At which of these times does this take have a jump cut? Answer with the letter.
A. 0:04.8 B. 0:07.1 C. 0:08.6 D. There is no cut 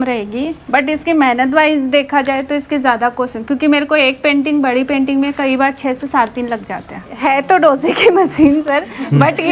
B